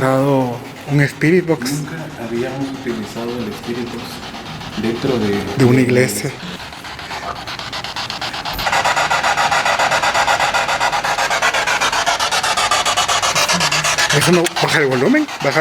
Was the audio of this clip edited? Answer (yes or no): yes